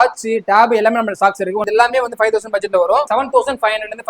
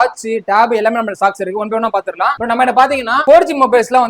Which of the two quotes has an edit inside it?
first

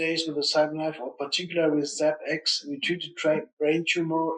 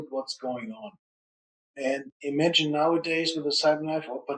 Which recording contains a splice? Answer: second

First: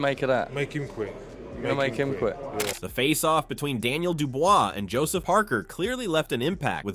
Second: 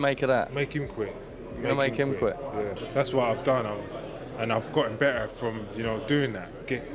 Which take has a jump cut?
second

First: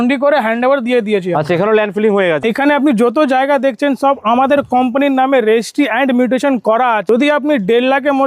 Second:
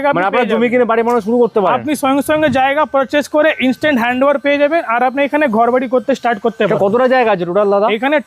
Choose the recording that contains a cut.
first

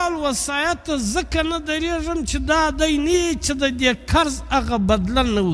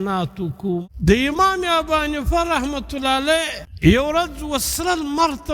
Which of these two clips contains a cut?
second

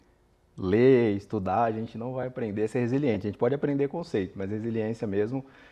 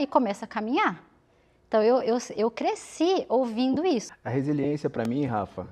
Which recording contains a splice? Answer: second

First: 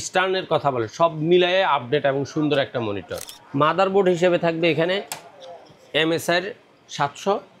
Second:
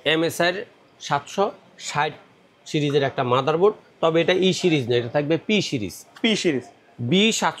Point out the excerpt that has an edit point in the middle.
first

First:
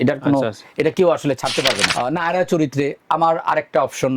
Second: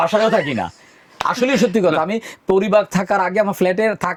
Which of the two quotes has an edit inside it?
first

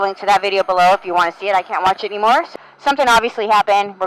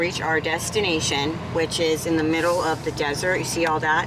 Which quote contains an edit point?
first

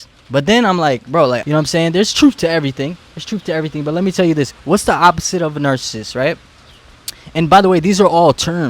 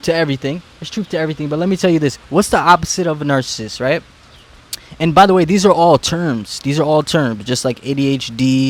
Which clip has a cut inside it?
first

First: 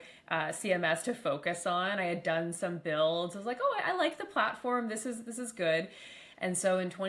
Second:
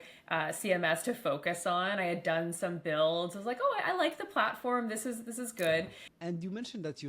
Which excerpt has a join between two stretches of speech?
second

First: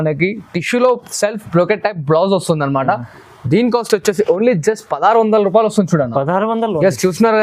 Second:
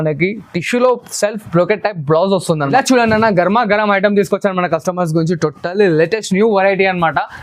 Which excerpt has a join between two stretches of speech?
second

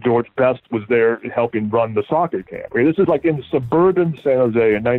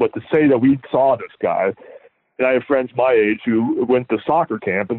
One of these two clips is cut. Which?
second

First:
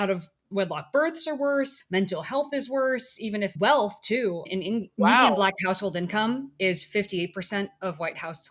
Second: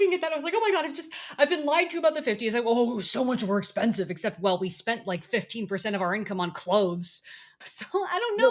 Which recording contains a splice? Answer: first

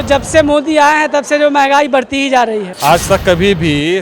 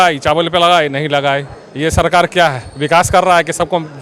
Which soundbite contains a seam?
first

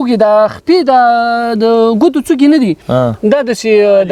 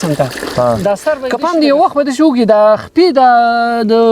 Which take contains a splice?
second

